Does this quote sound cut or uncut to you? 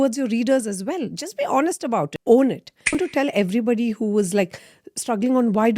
cut